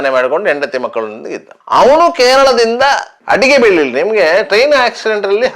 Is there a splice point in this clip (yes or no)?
yes